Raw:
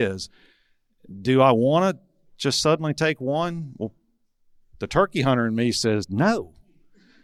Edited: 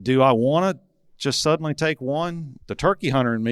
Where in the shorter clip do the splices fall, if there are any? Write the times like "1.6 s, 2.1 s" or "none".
2.5 s